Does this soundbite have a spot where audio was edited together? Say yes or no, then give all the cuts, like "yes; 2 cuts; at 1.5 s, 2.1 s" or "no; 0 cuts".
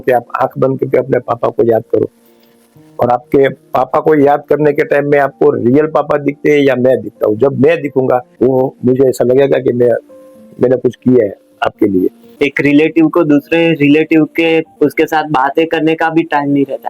yes; 3 cuts; at 8.3 s, 12.2 s, 14.7 s